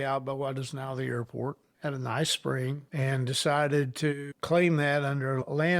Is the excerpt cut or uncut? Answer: cut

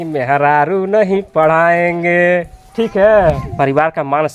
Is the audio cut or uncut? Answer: cut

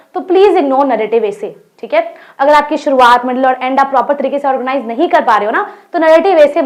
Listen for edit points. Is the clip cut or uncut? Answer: uncut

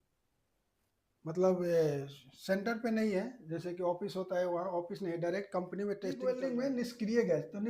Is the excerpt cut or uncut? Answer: cut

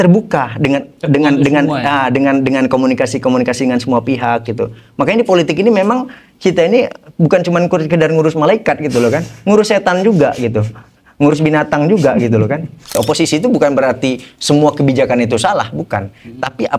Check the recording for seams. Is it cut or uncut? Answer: cut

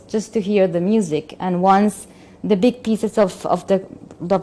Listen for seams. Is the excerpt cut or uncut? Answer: uncut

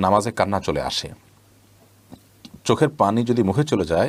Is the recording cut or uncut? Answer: uncut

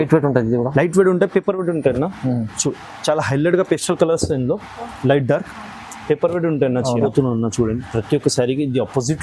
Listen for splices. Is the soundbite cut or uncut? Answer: cut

